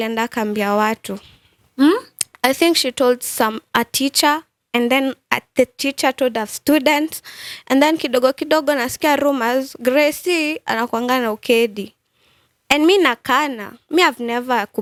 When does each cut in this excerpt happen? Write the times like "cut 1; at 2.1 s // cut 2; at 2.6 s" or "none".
none